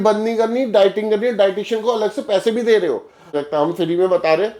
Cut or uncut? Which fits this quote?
cut